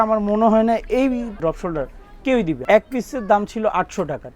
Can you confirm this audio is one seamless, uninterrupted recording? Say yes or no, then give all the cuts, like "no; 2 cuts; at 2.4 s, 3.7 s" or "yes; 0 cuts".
no; 1 cut; at 2.6 s